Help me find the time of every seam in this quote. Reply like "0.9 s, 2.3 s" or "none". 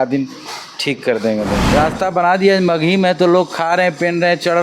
1.6 s